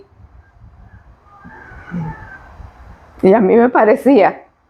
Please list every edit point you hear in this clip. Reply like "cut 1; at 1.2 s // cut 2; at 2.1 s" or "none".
none